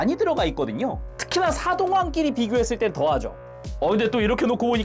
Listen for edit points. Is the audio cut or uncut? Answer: cut